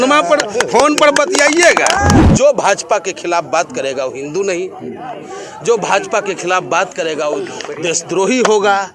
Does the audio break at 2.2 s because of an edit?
yes; 1 cut; at 2.2 s

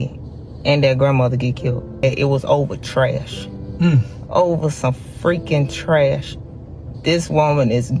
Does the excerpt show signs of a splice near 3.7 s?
no; 1 cut; at 1.9 s

